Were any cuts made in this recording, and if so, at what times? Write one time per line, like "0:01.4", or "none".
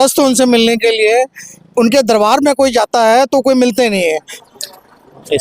0:04.4